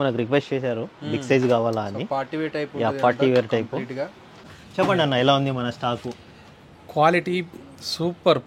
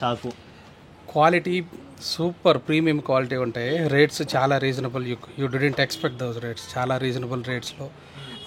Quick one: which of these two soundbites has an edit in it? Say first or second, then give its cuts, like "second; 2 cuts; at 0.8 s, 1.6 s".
first; 1 cut; at 4.5 s